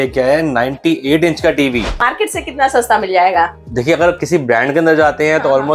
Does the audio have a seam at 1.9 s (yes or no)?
yes